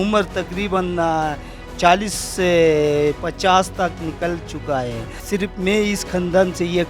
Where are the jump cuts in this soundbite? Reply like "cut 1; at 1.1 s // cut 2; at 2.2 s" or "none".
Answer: cut 1; at 5.2 s